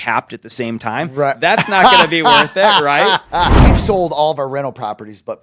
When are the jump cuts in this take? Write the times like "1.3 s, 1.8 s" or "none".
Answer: 3.6 s